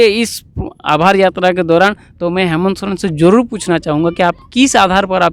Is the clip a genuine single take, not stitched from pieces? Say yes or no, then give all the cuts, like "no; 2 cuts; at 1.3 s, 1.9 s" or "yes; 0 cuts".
yes; 0 cuts